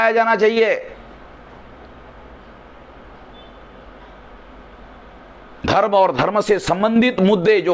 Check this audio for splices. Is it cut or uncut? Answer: uncut